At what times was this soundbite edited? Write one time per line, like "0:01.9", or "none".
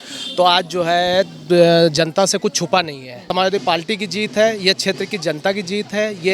0:03.2

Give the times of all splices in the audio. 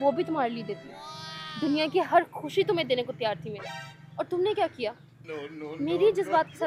none

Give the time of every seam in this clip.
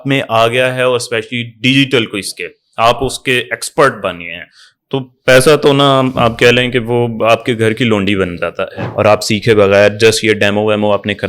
0:08.8

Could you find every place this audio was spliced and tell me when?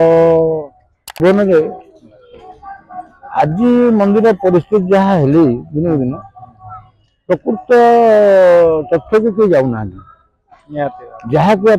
0:01.2

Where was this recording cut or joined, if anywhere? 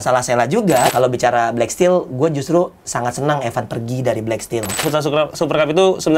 0:00.9
0:04.8

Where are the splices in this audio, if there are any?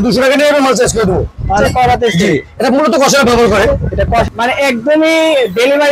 0:01.6
0:04.2

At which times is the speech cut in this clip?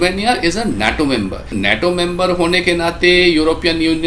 0:01.5

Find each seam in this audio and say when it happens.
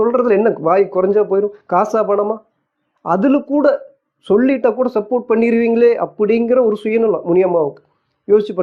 none

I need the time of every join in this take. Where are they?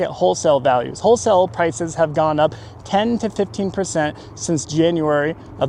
none

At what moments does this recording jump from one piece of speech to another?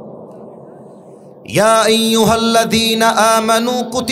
none

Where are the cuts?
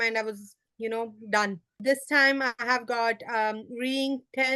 0:01.7

